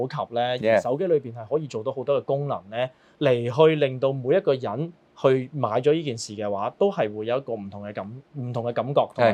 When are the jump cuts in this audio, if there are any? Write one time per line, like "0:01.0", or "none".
none